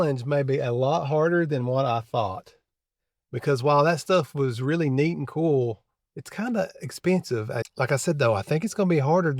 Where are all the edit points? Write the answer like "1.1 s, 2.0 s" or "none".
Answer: 7.6 s